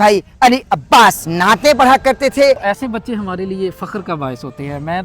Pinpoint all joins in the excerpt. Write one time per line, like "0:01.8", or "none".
0:01.3
0:02.6